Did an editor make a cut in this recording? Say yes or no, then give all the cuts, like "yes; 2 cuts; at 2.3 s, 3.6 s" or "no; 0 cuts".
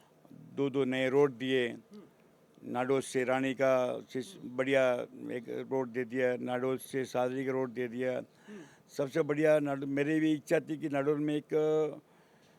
no; 0 cuts